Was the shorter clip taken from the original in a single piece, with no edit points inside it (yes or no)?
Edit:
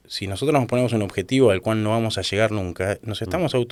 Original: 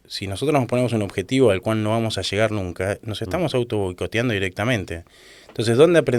yes